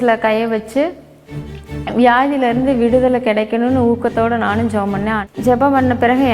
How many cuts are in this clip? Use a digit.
1